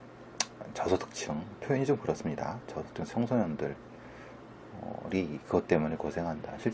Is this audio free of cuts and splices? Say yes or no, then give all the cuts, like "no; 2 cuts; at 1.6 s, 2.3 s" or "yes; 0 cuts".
yes; 0 cuts